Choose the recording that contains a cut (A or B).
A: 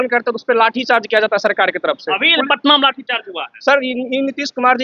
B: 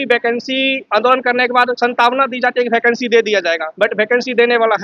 B